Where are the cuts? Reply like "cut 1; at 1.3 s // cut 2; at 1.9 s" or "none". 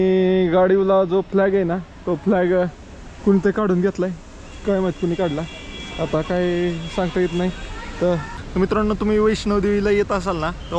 cut 1; at 8.3 s